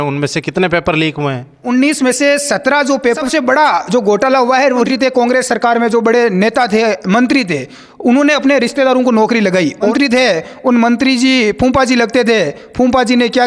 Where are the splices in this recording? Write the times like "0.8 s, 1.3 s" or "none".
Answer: 1.6 s, 3.2 s, 4.9 s, 9.9 s